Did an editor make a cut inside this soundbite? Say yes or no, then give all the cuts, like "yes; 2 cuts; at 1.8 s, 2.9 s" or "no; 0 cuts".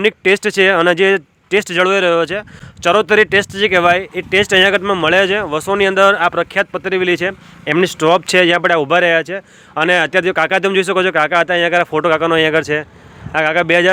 no; 0 cuts